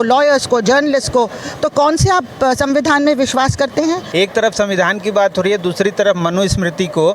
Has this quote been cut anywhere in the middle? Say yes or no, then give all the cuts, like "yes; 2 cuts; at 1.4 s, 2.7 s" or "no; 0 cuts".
yes; 1 cut; at 4.0 s